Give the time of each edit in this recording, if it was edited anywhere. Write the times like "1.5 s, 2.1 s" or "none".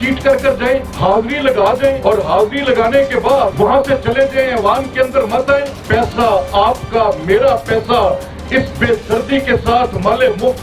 0.9 s, 2.0 s, 3.5 s, 5.8 s